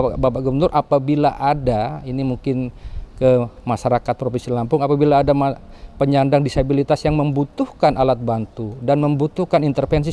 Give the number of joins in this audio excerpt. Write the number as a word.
zero